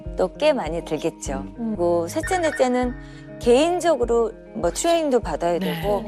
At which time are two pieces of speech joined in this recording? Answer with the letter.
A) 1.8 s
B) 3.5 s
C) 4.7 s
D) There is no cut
A